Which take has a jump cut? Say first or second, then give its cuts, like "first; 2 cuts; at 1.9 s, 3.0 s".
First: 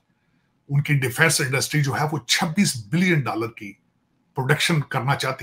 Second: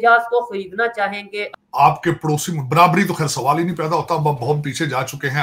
second; 1 cut; at 1.4 s